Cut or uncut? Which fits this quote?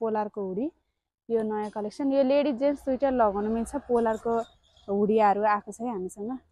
uncut